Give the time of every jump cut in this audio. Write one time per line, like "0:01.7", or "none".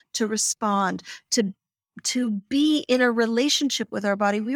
none

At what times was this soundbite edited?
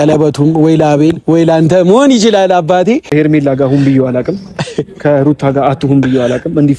0:03.1

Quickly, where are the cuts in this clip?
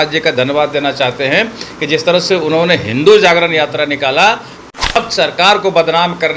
0:04.6

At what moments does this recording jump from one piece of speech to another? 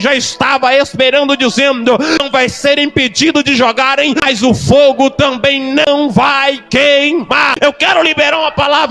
0:02.2
0:04.2
0:05.9
0:07.5

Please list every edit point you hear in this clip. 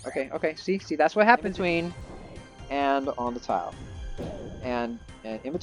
0:01.6

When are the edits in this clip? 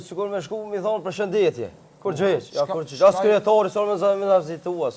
0:02.5

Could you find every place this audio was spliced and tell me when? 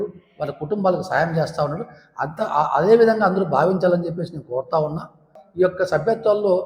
0:05.4

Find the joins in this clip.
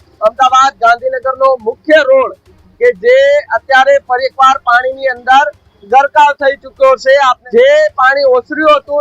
0:07.4

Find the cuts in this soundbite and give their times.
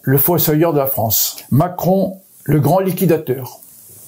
0:01.3

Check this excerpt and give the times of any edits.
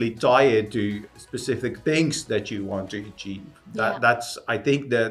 0:01.0

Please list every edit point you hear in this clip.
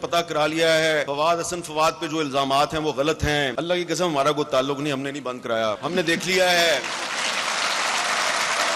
0:01.1
0:03.5
0:05.8

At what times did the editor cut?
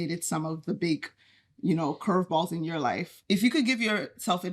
0:03.2

